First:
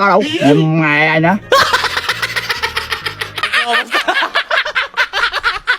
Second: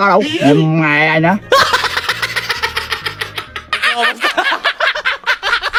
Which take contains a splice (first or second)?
first